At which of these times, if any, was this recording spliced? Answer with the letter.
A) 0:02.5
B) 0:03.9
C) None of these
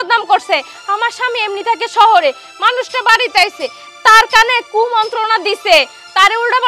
C